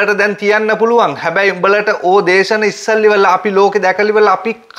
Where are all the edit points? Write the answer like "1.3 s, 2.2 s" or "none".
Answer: none